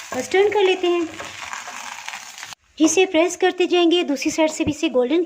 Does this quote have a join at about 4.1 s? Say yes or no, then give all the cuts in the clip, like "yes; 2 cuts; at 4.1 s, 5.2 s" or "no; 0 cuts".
no; 1 cut; at 2.6 s